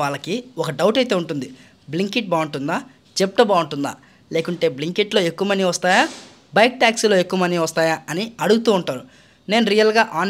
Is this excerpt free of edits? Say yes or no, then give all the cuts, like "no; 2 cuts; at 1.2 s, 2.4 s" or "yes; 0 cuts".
yes; 0 cuts